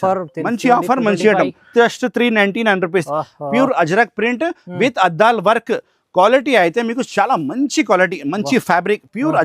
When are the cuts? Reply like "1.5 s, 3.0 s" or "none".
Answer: 1.6 s